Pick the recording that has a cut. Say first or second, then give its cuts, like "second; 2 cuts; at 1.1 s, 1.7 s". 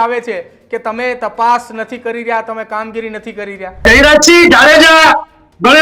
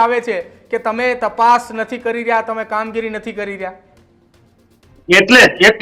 first; 1 cut; at 3.9 s